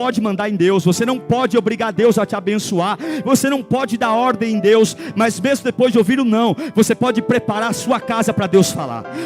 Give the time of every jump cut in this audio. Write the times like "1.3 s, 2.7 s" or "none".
0.9 s